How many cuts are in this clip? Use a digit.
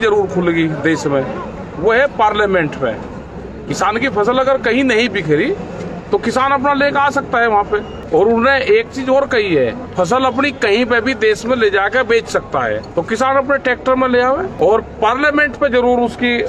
4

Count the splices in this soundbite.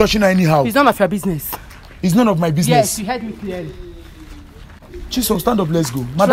0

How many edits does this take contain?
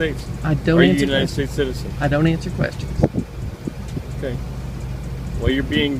0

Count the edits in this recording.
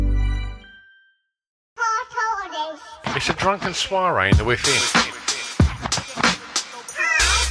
1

